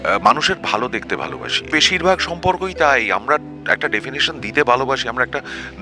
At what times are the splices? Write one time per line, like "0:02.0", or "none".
0:01.6